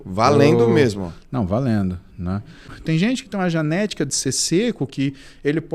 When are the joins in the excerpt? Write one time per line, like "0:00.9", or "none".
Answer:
0:02.7